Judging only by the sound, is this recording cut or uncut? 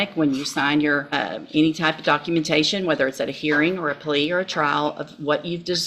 cut